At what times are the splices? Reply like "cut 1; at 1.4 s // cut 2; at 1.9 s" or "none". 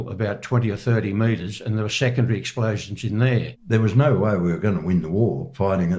cut 1; at 3.5 s